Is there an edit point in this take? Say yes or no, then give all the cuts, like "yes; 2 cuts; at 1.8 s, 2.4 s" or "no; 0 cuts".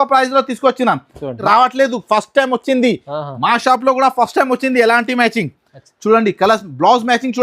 yes; 1 cut; at 1.4 s